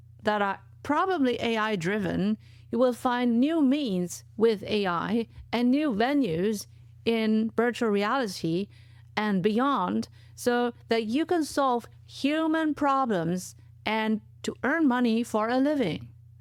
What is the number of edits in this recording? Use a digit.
0